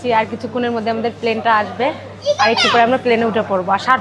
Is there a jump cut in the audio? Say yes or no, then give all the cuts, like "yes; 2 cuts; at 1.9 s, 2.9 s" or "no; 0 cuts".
no; 0 cuts